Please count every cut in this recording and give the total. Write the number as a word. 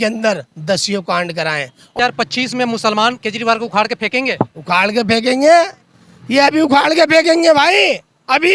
one